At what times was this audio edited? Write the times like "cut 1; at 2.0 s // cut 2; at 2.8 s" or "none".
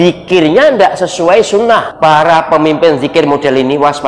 cut 1; at 1.9 s